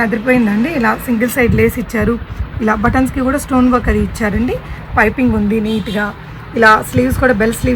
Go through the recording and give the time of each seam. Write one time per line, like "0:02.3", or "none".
none